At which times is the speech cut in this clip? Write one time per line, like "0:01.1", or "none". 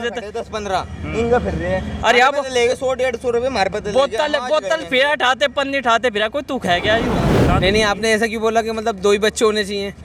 0:07.4